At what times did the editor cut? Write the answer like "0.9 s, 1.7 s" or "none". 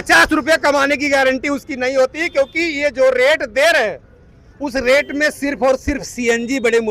none